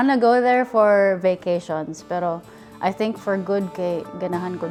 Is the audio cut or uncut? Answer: uncut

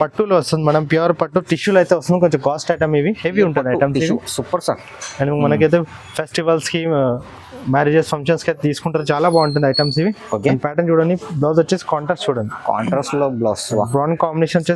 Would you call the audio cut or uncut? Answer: uncut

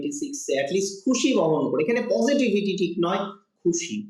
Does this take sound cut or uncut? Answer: uncut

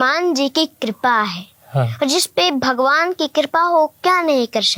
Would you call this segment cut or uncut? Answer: uncut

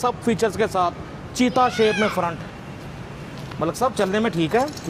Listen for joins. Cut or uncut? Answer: uncut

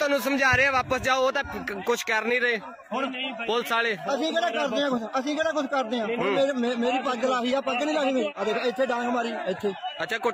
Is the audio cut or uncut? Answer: cut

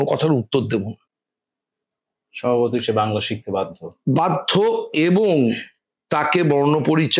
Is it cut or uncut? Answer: uncut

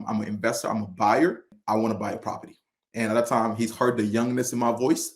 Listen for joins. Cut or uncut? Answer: cut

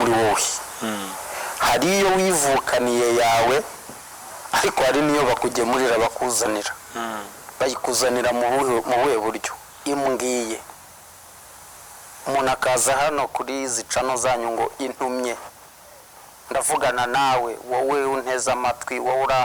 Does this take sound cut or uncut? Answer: uncut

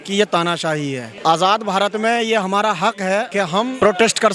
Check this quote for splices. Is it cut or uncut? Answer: cut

